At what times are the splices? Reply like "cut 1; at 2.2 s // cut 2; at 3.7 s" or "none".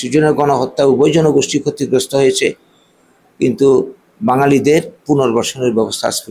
none